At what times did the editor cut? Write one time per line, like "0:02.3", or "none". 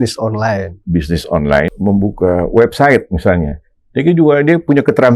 0:01.7